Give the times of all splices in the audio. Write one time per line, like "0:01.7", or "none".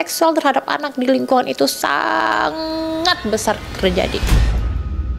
0:04.2